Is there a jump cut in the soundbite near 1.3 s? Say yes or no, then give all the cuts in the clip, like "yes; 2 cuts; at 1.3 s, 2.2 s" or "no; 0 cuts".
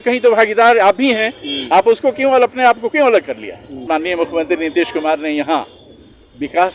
no; 1 cut; at 3.9 s